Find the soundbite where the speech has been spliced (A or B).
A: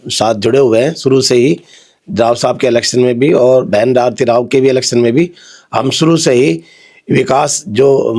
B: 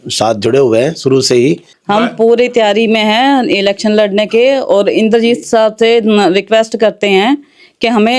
B